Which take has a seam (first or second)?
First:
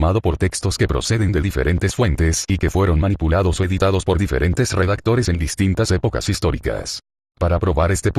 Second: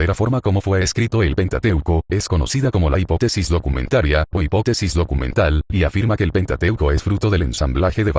first